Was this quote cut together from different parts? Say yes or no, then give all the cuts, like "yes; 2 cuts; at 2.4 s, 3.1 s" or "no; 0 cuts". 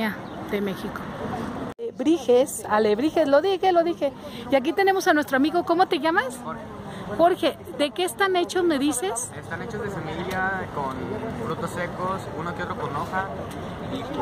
yes; 1 cut; at 1.8 s